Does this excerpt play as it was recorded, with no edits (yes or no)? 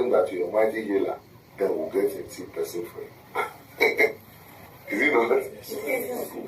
no